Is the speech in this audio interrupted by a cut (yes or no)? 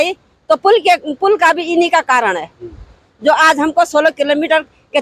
no